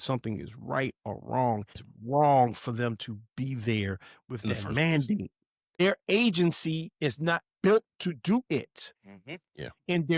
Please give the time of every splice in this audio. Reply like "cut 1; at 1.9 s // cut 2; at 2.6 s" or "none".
cut 1; at 1.9 s // cut 2; at 5.8 s